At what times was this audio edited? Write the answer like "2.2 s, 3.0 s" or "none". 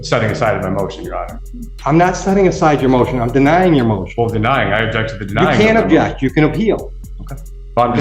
none